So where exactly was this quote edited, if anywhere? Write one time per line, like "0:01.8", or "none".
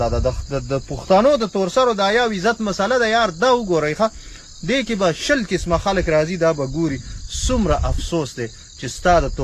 none